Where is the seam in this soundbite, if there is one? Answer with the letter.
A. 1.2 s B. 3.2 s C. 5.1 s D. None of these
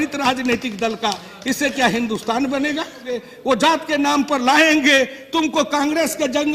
B